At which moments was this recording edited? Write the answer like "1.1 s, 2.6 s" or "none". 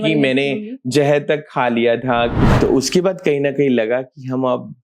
2.5 s